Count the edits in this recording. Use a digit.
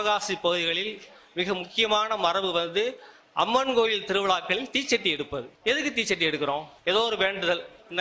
2